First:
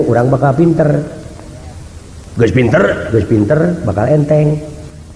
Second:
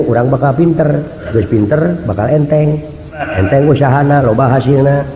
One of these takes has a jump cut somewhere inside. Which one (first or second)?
second